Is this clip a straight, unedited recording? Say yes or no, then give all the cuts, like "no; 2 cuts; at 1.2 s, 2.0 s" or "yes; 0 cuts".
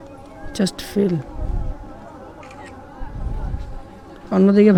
yes; 0 cuts